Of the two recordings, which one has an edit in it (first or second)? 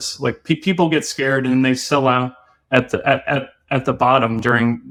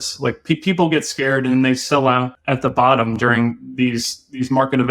second